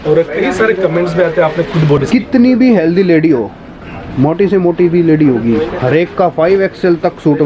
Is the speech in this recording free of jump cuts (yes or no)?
no